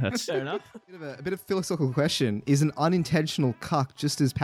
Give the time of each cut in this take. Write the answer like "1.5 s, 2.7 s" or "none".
1.0 s